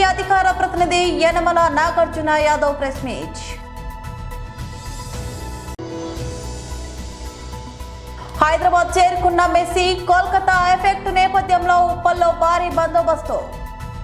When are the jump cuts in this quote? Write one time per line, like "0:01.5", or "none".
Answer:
none